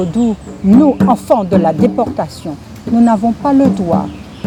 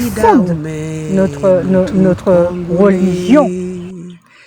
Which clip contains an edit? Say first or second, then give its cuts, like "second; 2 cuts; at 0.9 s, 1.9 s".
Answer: second; 1 cut; at 3.5 s